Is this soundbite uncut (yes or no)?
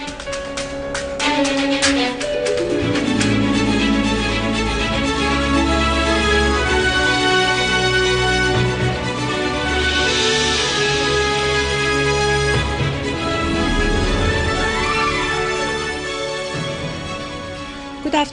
no